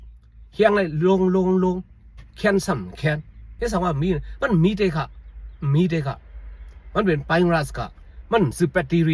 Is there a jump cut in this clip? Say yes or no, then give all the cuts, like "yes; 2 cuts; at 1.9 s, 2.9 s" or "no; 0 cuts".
yes; 1 cut; at 3.5 s